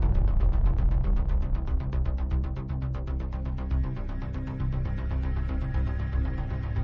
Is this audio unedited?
yes; 0 cuts

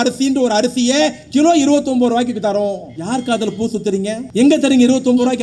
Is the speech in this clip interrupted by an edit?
yes; 2 cuts; at 2.9 s, 4.2 s

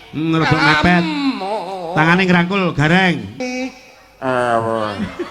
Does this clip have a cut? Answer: yes; 1 cut; at 3.3 s

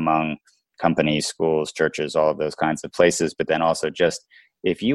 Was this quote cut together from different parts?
no; 0 cuts

